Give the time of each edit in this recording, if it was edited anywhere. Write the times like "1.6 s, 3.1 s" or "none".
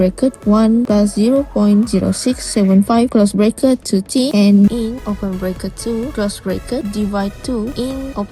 4.7 s